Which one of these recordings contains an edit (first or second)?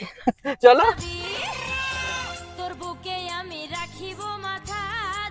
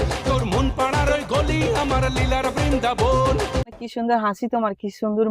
second